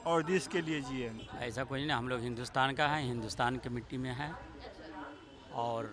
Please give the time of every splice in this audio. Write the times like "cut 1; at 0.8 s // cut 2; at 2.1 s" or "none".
cut 1; at 1.3 s